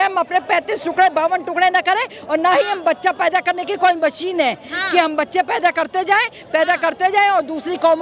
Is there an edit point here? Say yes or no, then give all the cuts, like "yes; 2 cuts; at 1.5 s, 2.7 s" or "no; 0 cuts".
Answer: no; 0 cuts